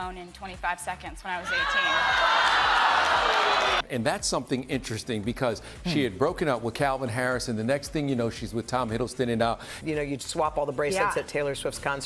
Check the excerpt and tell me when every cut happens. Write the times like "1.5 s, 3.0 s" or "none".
3.8 s, 9.6 s